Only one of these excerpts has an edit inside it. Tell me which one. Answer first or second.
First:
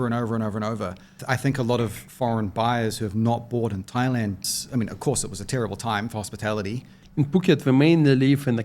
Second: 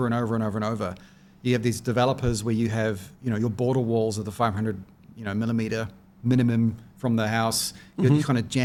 first